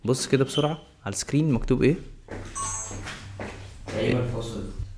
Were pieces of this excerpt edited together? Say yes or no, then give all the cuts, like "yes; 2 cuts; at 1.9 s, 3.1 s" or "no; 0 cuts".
no; 0 cuts